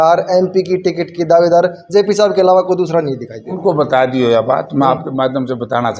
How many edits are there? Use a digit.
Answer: 1